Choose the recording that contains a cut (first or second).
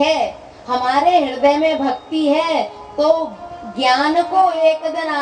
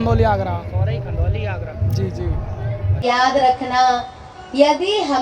second